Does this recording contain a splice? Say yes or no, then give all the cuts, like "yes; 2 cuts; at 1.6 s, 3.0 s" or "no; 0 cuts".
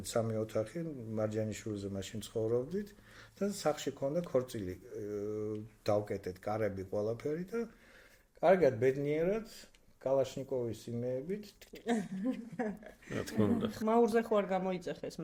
no; 0 cuts